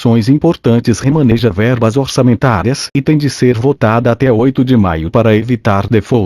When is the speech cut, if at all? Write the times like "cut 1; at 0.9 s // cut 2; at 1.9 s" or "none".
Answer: cut 1; at 0.9 s